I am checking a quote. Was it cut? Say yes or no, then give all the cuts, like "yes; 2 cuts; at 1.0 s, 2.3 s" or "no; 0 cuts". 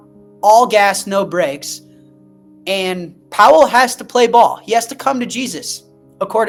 no; 0 cuts